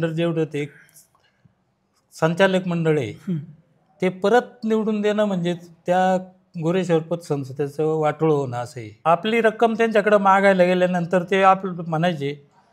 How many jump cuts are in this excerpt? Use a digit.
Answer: 1